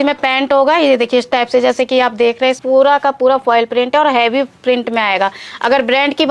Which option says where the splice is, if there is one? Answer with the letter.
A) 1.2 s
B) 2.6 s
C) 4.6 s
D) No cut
B